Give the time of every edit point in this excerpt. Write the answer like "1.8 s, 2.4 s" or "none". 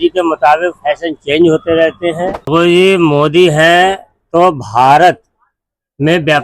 2.5 s

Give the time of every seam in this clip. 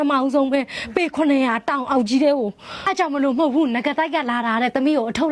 2.8 s

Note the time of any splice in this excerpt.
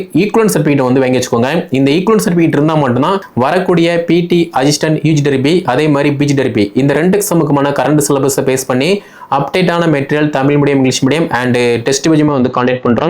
3.3 s

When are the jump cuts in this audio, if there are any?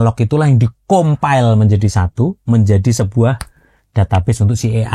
none

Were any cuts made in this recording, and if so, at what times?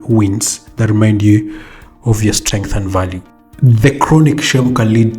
3.3 s

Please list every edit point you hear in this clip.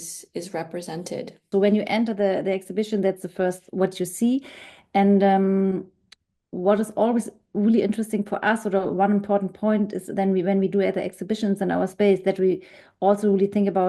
1.4 s

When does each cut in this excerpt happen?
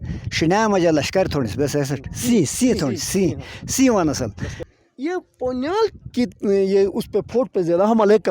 4.6 s

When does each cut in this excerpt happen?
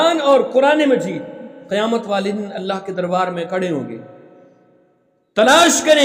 none

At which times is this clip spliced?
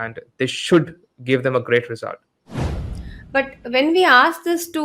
2.7 s

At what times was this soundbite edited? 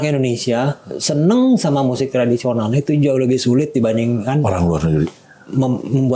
none

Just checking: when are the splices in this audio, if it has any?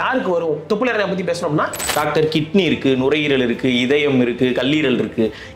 1.8 s

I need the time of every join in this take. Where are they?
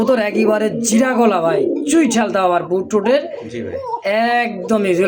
none

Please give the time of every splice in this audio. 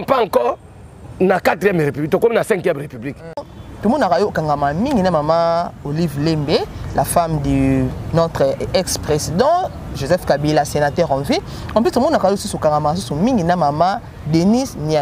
3.4 s

